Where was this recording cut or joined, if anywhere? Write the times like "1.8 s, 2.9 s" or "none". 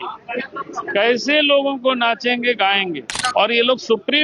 3.1 s